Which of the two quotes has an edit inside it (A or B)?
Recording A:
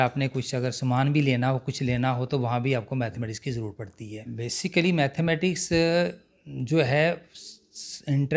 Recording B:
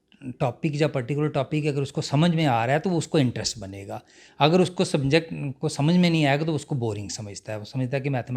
A